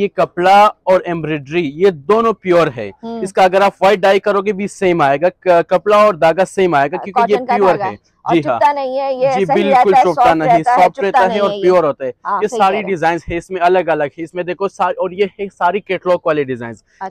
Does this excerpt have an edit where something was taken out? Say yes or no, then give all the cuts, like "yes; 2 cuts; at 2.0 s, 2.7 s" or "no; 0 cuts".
no; 0 cuts